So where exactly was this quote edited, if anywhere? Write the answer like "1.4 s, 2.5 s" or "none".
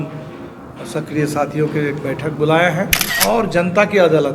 3.0 s